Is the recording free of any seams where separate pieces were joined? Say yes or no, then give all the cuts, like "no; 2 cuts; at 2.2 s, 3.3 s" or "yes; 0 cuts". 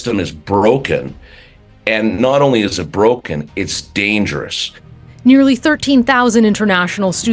yes; 0 cuts